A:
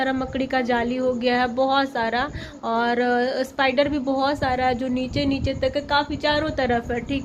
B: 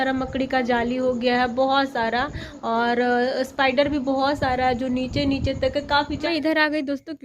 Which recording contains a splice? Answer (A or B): B